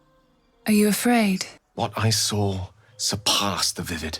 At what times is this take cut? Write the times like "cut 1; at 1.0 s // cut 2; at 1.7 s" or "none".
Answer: cut 1; at 1.6 s